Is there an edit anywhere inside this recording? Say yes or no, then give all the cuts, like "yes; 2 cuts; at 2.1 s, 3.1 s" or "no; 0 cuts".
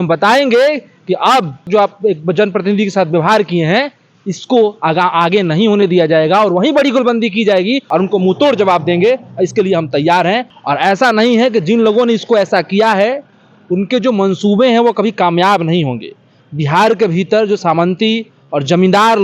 yes; 3 cuts; at 1.7 s, 7.8 s, 10.5 s